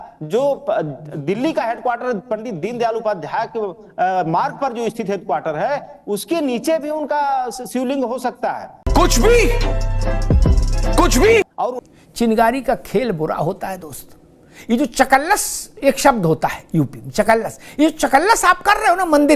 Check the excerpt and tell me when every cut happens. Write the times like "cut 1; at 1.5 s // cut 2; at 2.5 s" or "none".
cut 1; at 11.8 s